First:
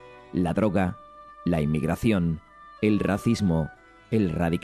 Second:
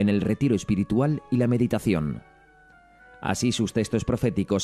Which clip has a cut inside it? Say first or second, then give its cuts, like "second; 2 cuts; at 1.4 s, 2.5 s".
first; 1 cut; at 2.1 s